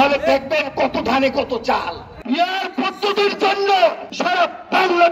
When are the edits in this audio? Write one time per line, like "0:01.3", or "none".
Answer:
0:02.1
0:04.1

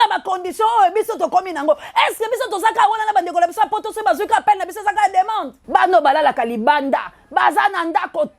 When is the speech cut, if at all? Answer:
0:05.5

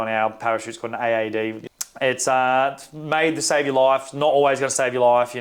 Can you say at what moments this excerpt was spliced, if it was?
0:01.6

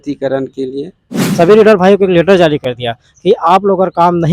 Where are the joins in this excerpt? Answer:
0:01.2

